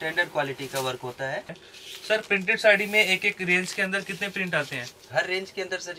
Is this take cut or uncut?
cut